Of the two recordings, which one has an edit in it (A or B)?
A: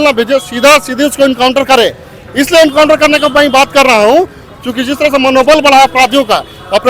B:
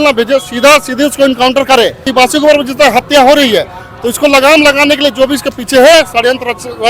B